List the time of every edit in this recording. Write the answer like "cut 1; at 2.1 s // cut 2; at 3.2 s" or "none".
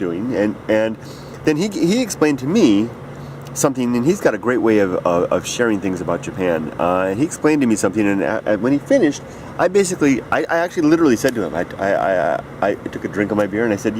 cut 1; at 2.8 s